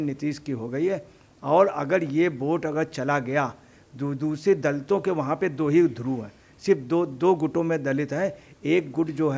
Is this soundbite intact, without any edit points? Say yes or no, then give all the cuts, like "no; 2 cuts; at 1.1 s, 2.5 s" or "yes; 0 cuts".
yes; 0 cuts